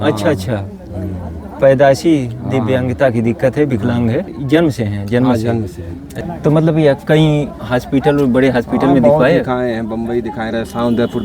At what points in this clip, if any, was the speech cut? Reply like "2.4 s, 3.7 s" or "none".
4.4 s, 6.2 s

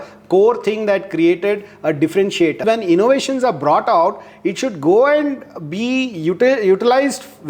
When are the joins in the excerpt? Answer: 2.6 s

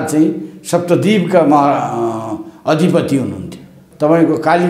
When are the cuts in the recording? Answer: 3.8 s

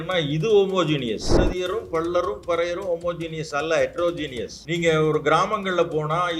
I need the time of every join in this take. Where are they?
1.4 s, 4.5 s

